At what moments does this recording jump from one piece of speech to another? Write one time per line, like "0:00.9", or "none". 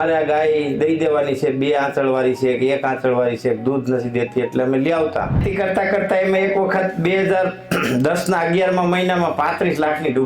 0:05.5